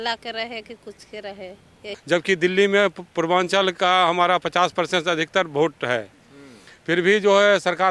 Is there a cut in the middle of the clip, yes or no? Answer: yes